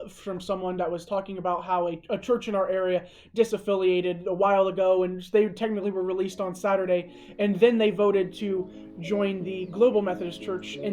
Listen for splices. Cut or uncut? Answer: uncut